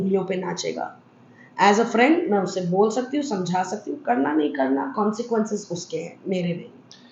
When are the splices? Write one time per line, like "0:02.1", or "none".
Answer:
none